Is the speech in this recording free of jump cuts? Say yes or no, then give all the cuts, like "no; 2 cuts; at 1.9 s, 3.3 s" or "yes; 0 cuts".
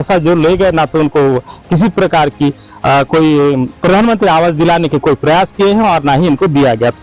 yes; 0 cuts